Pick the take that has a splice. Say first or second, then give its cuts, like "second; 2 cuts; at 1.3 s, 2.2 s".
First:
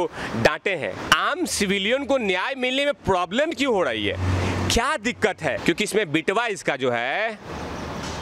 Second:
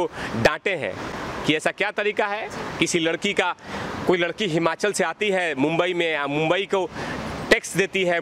first; 2 cuts; at 1.1 s, 5.6 s